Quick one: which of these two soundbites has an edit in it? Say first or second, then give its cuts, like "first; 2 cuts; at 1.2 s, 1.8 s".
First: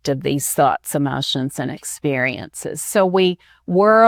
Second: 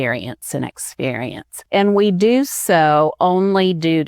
second; 1 cut; at 1.5 s